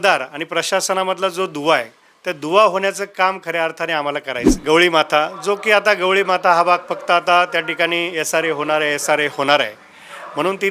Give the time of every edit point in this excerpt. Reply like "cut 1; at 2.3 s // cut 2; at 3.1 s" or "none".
cut 1; at 4.5 s